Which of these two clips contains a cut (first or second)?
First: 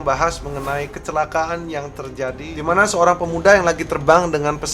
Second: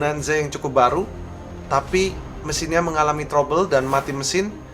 first